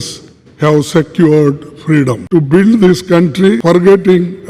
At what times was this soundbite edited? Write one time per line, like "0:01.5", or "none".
0:02.2
0:03.6